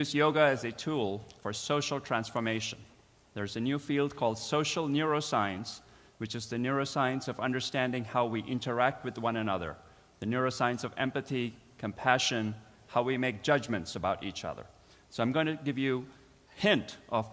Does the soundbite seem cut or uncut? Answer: cut